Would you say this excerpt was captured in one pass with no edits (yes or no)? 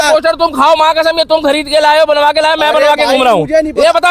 yes